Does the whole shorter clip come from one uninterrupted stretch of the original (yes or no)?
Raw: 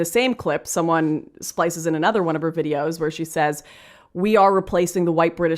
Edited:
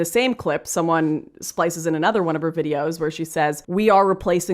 no